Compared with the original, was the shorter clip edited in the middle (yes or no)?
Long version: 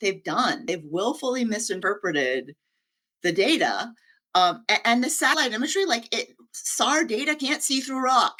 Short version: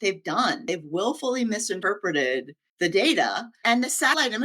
yes